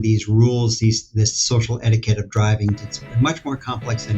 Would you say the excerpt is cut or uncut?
cut